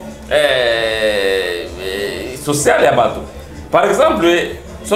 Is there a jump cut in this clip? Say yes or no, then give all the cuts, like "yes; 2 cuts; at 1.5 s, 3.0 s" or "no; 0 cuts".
no; 0 cuts